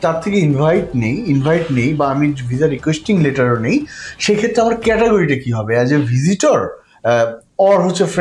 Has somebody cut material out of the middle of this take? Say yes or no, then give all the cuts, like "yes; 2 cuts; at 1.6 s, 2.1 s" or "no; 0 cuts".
no; 0 cuts